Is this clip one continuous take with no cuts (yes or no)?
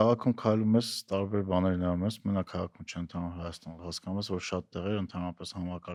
yes